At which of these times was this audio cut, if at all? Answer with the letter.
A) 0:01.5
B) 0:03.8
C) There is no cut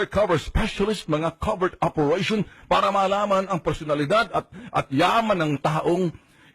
B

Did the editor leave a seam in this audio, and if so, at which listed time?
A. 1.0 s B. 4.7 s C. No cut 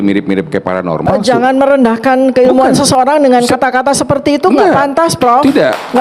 A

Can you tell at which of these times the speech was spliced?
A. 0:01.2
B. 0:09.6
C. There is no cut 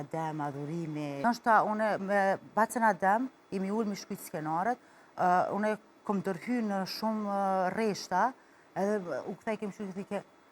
A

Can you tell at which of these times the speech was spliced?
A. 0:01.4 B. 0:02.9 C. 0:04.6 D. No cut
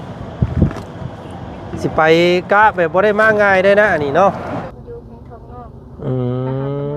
C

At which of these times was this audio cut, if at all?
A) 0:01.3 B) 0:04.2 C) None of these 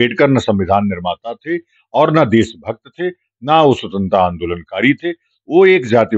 C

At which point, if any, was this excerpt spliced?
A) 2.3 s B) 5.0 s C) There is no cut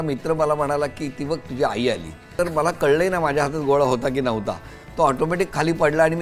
A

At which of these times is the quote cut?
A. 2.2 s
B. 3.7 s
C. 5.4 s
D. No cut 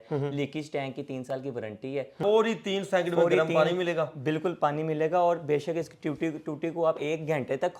A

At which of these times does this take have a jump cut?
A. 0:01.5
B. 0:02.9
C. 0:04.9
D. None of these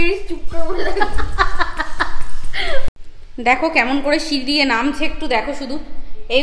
B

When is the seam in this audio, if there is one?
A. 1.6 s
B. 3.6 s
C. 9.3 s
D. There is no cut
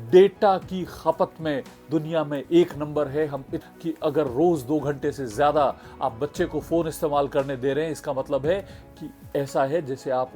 B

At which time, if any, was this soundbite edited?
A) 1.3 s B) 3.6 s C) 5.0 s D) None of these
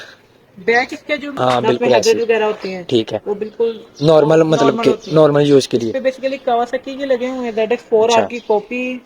A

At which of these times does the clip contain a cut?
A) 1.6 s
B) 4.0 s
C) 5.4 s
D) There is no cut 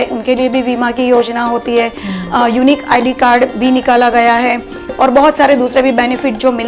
D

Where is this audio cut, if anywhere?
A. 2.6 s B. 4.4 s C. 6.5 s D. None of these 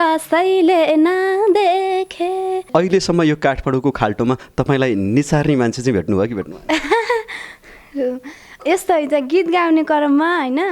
A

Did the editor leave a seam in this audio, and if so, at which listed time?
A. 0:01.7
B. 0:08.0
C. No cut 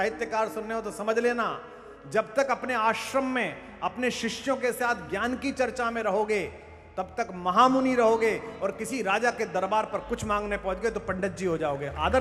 C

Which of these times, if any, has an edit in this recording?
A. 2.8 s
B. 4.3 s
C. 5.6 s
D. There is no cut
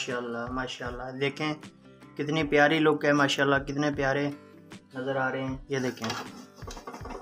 C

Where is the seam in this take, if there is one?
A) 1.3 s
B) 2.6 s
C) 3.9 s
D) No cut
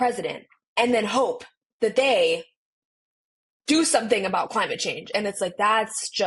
D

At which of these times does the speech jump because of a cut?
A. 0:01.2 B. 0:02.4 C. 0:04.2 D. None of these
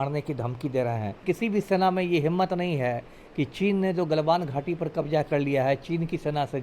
A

